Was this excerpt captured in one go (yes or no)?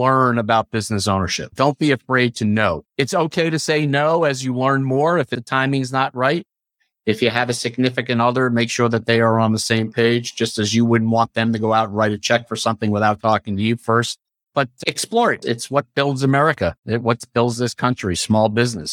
no